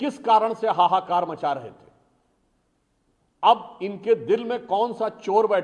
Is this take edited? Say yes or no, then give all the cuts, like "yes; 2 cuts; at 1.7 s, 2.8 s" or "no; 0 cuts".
no; 0 cuts